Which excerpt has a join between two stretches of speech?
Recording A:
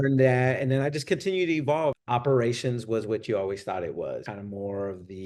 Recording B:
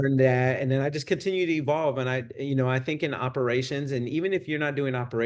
A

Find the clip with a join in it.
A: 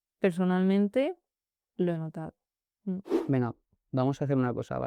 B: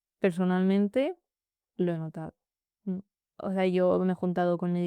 A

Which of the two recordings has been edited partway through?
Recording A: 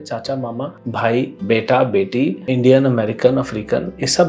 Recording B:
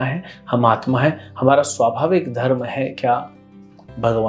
A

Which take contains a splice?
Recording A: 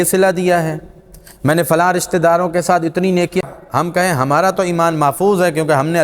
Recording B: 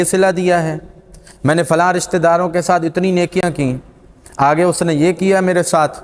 A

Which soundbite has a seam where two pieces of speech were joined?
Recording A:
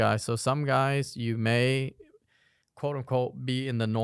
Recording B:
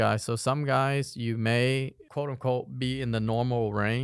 B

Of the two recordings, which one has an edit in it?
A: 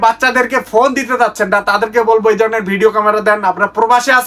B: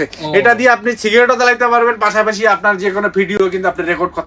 B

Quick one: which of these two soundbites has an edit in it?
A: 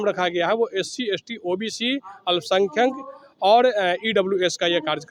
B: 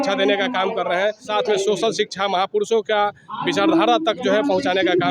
B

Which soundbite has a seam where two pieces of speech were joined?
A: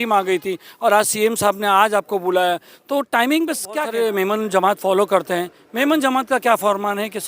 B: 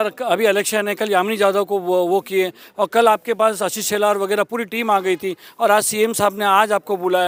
A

